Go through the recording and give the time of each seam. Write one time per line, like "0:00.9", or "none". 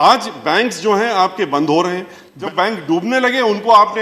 0:02.3